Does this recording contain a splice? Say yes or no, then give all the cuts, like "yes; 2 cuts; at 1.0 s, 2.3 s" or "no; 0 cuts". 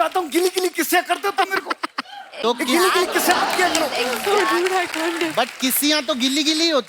no; 0 cuts